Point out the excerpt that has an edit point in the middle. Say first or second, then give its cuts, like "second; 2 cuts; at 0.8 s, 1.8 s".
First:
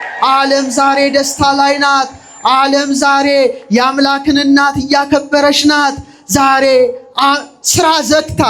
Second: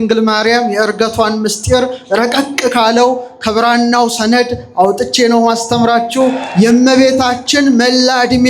second; 1 cut; at 6.4 s